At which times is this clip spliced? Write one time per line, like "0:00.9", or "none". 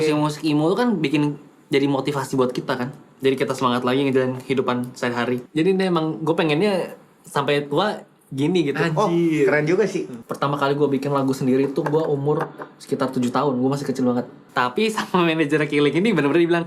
0:05.5
0:10.2
0:14.4

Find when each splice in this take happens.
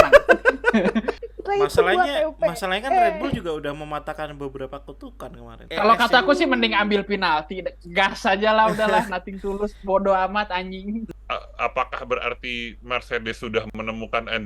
0:01.2
0:05.6
0:11.1

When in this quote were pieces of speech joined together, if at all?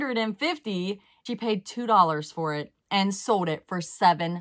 0:01.1

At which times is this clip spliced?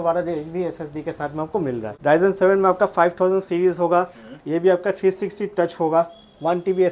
0:01.9

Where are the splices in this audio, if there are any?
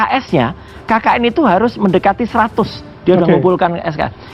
none

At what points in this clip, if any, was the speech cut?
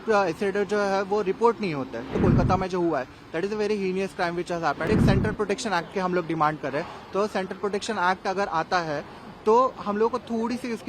0:02.1
0:04.9

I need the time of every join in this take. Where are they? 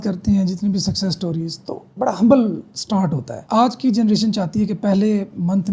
none

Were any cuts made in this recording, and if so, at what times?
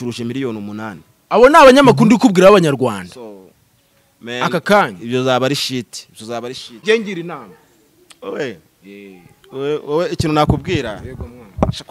0:06.7

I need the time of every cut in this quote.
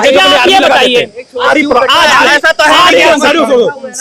0:01.5

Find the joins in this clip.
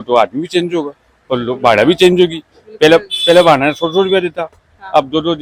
none

